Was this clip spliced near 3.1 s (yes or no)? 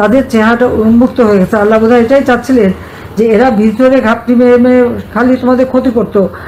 no